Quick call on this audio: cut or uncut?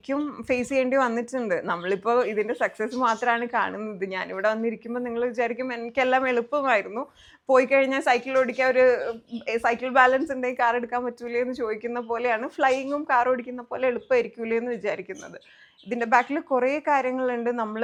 uncut